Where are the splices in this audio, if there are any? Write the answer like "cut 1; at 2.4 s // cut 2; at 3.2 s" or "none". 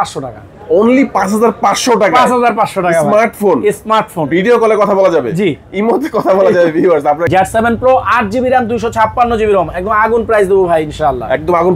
cut 1; at 7.2 s